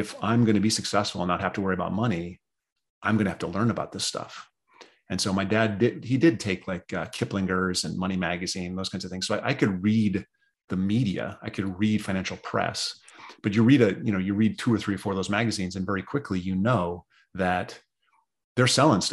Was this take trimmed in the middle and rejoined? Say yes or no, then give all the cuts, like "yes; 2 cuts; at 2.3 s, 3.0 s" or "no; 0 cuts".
no; 0 cuts